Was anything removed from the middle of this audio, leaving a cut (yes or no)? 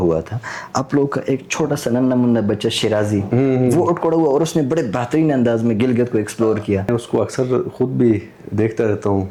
no